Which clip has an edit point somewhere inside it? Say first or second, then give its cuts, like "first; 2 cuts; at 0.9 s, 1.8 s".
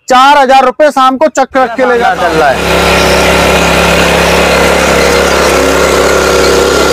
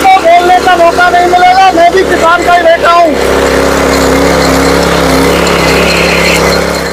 first; 1 cut; at 2.0 s